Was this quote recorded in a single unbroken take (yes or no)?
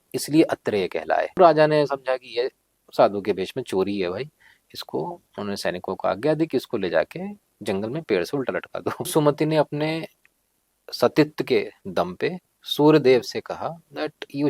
no